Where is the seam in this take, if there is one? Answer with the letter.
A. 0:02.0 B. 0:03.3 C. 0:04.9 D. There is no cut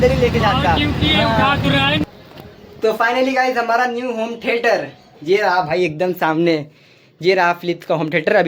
A